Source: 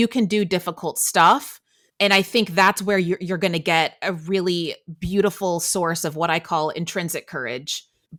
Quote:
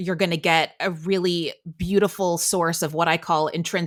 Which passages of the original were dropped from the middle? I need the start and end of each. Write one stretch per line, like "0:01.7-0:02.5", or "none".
none

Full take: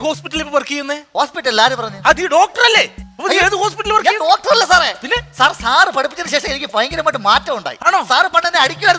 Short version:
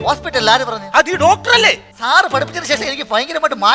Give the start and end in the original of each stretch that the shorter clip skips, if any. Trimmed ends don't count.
0:03.1-0:05.6

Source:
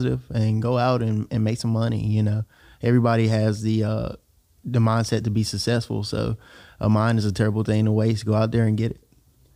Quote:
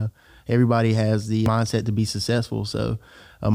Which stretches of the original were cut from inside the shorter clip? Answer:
0:03.8-0:04.8

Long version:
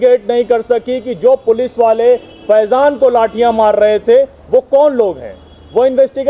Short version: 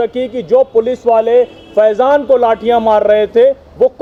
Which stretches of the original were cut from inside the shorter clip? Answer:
none

